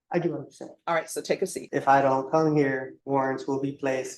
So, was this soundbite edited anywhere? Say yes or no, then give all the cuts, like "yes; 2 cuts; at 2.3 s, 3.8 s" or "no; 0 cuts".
yes; 2 cuts; at 1.6 s, 2.9 s